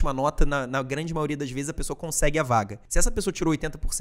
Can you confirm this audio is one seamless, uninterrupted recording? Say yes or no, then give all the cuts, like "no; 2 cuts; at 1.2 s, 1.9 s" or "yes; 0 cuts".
no; 1 cut; at 2.8 s